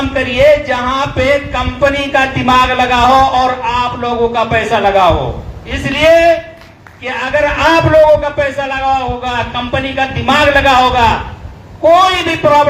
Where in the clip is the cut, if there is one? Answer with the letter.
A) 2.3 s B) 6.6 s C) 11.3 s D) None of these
D